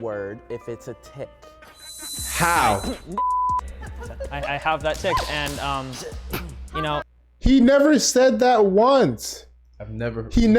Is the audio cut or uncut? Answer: uncut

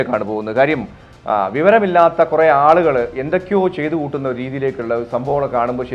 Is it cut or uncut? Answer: uncut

